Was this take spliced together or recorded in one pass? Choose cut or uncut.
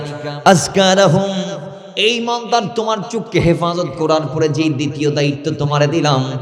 uncut